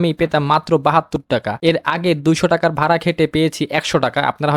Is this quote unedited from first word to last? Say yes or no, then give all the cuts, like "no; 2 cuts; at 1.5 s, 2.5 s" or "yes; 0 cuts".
yes; 0 cuts